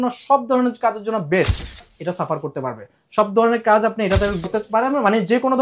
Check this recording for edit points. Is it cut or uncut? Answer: cut